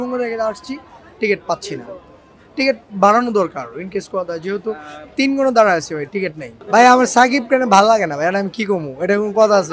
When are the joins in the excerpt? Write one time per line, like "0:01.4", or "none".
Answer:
none